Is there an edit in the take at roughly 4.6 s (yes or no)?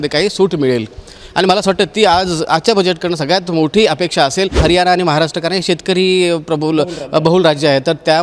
yes